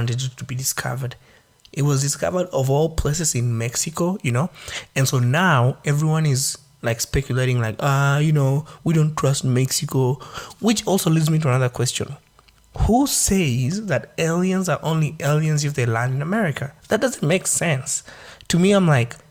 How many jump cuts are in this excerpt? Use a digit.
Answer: 0